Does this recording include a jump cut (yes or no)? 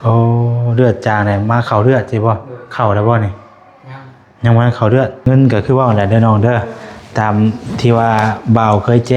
yes